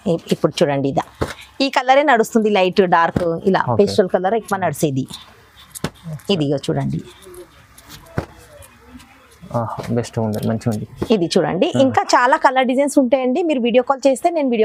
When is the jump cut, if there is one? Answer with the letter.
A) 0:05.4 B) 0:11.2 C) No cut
C